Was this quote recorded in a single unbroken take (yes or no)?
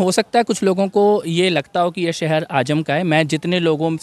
yes